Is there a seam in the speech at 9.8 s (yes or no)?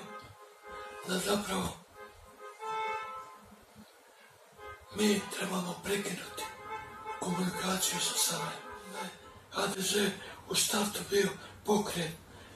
yes